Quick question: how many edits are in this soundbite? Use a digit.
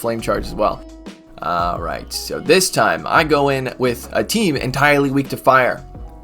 1